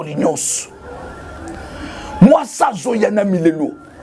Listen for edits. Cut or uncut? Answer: uncut